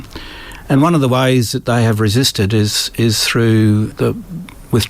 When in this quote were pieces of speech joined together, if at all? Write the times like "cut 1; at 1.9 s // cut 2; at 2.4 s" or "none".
cut 1; at 3.9 s